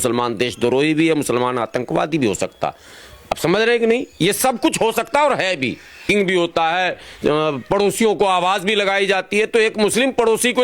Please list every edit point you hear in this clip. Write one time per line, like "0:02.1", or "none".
0:06.0